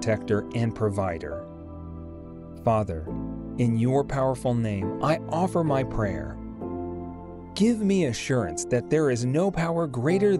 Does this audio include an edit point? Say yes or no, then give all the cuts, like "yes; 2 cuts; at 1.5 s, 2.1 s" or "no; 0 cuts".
yes; 2 cuts; at 6.4 s, 7.5 s